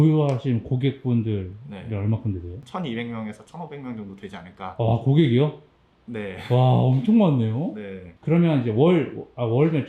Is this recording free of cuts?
yes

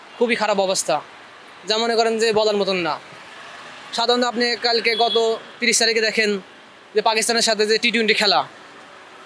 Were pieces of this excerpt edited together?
no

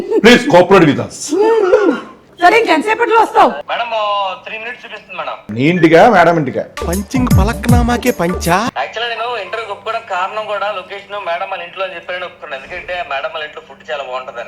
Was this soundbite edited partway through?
no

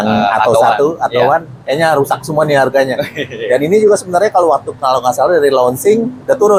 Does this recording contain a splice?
no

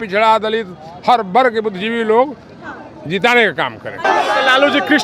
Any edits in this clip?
yes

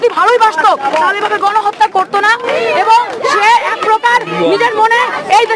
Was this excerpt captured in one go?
yes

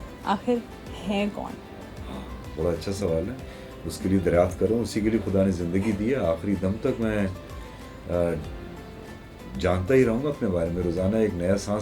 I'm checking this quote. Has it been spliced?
no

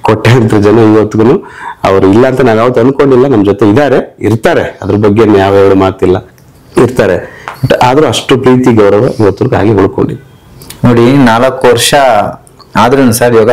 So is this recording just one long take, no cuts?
yes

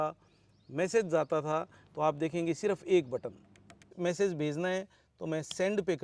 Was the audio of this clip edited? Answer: yes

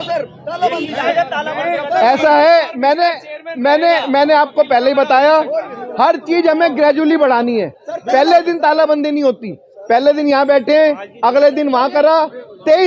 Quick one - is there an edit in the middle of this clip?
no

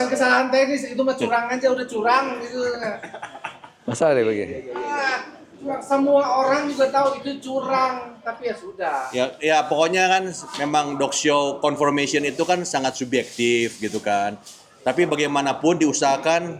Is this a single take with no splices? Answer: yes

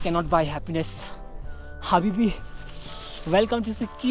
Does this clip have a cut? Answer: no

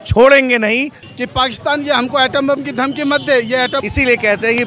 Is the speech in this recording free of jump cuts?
no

